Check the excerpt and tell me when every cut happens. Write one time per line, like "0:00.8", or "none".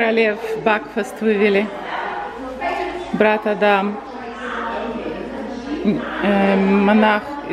none